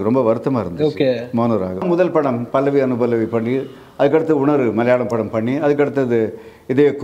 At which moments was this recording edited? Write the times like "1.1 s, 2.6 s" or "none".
1.8 s

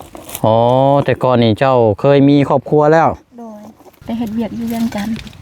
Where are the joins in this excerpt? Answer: 4.0 s

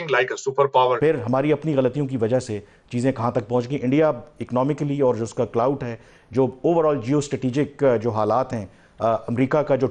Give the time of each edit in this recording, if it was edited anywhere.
1.0 s

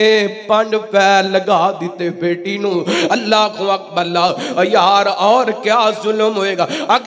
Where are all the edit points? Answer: none

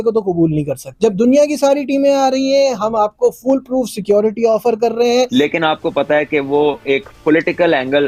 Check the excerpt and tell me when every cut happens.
0.9 s, 5.3 s

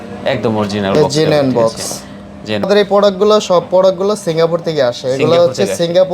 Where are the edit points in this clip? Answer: 2.7 s

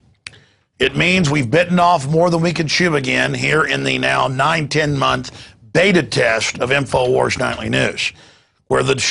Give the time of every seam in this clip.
1.7 s

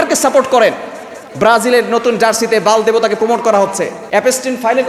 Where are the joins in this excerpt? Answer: 3.9 s

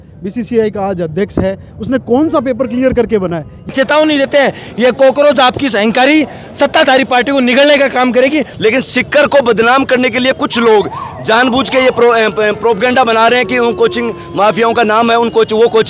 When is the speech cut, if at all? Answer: 3.7 s, 8.5 s

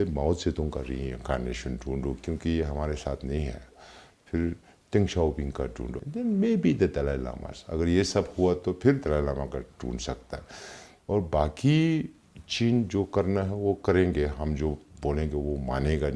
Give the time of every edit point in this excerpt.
none

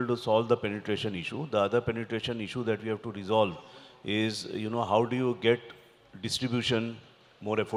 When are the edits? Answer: none

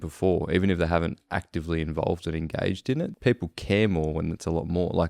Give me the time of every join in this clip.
3.1 s

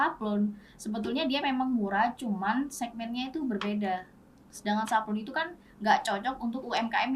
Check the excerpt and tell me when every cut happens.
none

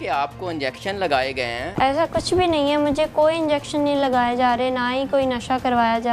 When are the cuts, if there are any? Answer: 1.7 s

